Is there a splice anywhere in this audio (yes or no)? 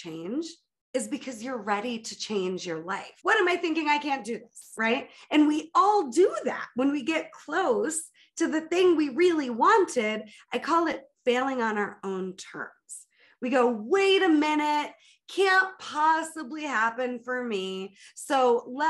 yes